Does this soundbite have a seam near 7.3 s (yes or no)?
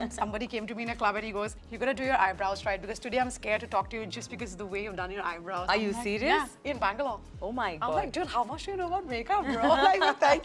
no